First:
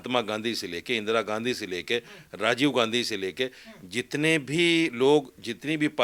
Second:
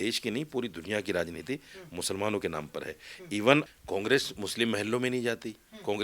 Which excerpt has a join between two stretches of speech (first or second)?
second